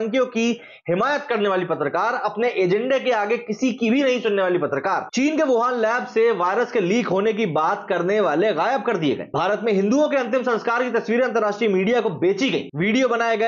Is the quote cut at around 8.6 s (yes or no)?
no